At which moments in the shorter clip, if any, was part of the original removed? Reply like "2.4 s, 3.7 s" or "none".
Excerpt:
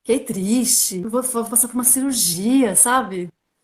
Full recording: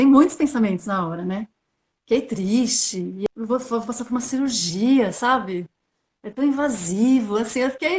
1.0 s